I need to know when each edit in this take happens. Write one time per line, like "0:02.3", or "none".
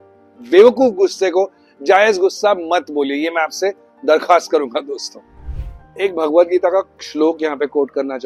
none